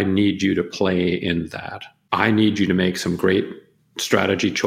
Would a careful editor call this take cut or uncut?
cut